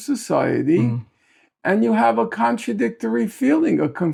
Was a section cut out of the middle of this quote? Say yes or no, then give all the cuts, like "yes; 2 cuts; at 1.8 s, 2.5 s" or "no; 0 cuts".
no; 0 cuts